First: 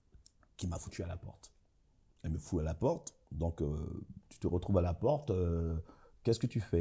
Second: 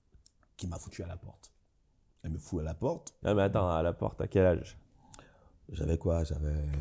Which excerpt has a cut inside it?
second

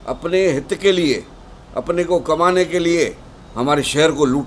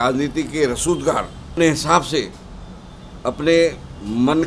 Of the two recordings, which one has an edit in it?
second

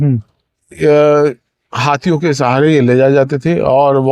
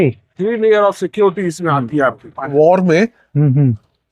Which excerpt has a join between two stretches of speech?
second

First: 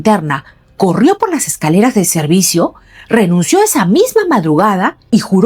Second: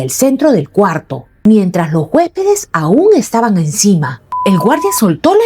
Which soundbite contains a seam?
second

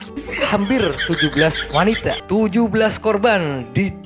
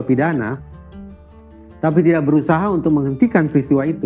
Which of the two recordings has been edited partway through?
first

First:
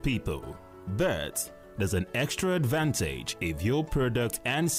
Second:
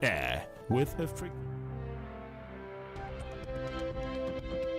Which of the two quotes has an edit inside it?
second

